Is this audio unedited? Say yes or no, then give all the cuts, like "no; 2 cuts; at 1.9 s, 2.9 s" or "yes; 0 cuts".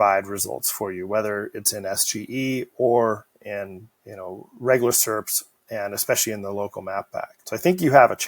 no; 1 cut; at 7.4 s